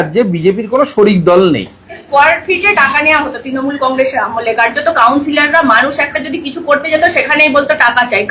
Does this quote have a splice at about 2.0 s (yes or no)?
yes